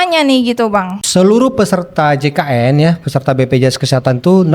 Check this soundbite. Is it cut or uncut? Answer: cut